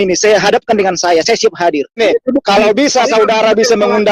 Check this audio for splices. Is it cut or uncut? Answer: cut